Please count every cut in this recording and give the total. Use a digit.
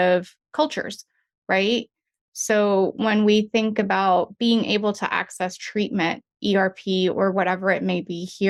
0